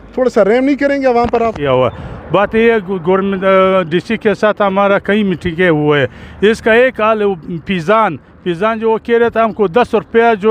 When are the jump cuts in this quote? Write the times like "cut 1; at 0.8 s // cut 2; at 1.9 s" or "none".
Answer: none